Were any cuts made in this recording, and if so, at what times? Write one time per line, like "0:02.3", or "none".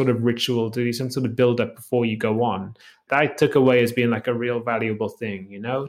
0:03.0